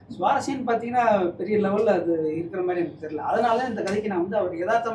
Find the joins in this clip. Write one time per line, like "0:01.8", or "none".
none